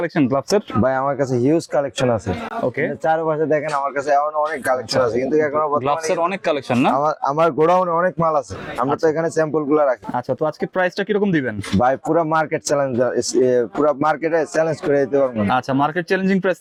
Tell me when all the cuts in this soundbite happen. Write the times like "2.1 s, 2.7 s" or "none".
none